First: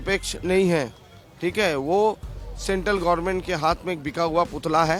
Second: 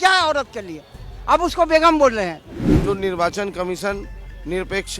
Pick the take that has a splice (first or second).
second